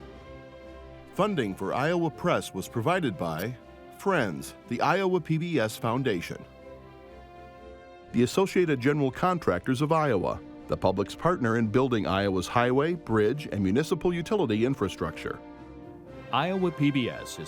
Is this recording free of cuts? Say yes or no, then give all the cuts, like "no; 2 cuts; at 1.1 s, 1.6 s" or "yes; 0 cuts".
no; 1 cut; at 1.1 s